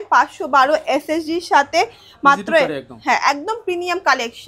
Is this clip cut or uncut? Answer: uncut